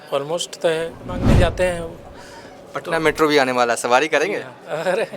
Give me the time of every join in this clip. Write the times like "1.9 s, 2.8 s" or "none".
1.2 s